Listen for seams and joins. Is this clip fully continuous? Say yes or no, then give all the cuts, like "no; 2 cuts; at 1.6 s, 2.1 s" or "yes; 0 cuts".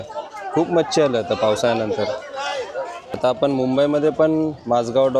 no; 1 cut; at 3.0 s